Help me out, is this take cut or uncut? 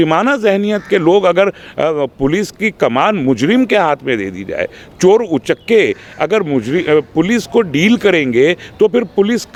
uncut